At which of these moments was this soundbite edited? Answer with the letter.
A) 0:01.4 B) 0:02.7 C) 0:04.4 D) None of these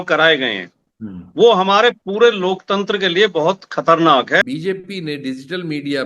C